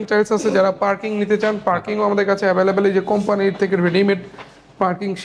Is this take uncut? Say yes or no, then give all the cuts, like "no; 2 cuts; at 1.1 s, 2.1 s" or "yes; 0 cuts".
yes; 0 cuts